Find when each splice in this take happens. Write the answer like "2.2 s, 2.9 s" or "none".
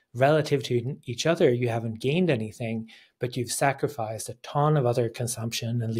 none